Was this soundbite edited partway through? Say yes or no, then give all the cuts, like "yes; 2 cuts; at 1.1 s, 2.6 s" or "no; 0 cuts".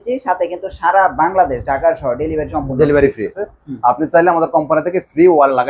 yes; 1 cut; at 3.5 s